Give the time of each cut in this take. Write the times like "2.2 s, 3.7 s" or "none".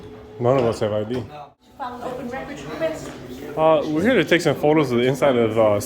1.6 s